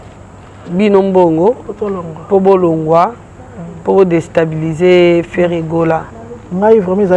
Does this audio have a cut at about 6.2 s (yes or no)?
yes